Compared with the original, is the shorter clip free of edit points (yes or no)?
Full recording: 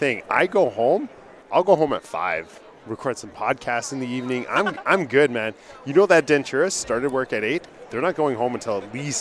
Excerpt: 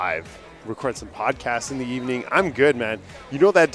no